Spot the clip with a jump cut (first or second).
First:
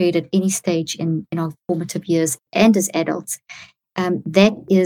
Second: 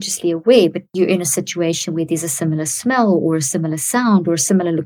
first